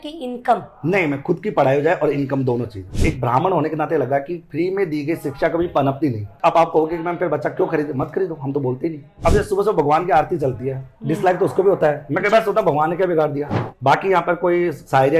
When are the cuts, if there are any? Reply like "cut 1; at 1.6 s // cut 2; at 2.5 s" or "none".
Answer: cut 1; at 3.0 s // cut 2; at 6.3 s // cut 3; at 9.2 s // cut 4; at 13.6 s